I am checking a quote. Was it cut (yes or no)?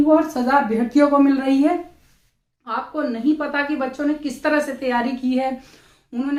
no